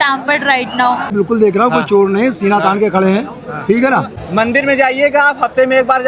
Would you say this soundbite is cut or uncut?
cut